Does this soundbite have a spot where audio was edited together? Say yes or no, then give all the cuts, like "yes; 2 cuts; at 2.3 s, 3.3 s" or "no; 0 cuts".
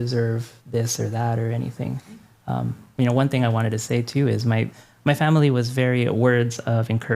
yes; 2 cuts; at 2.2 s, 4.8 s